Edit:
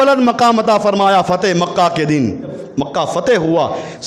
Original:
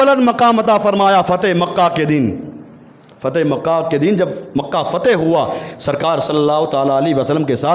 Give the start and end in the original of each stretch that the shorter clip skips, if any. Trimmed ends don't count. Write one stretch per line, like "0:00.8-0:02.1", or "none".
0:02.6-0:04.4